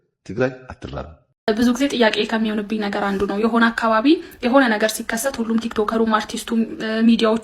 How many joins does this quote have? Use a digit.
1